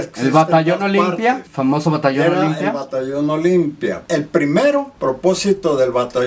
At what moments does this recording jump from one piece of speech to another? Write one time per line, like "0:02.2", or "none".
0:04.0